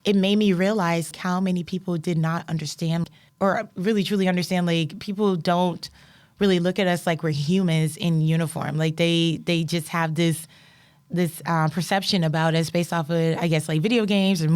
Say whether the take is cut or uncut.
cut